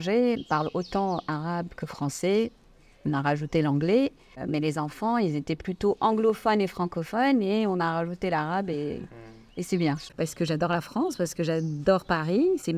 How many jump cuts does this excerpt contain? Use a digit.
1